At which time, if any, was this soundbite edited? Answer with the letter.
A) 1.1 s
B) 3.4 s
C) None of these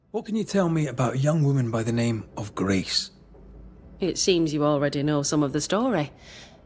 C